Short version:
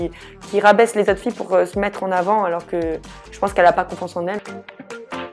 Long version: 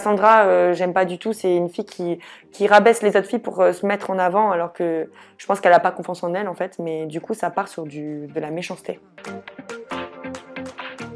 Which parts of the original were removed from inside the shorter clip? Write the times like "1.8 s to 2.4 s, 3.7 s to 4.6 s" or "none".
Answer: 6.5 s to 9.2 s